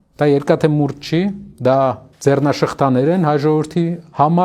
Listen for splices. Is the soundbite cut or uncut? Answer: cut